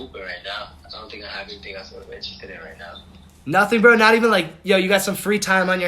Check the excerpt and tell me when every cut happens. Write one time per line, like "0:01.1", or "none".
none